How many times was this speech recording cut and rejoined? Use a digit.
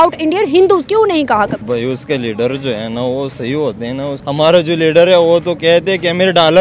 2